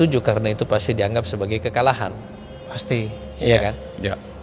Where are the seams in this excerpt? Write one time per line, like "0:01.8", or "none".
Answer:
none